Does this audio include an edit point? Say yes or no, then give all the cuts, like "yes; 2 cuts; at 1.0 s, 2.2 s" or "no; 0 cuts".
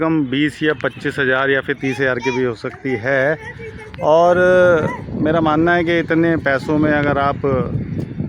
no; 0 cuts